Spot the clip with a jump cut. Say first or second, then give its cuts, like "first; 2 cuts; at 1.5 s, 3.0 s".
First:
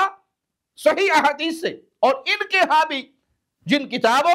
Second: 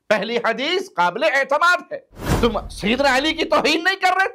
second; 1 cut; at 2.2 s